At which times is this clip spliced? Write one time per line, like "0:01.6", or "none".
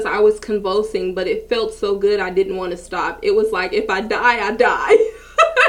none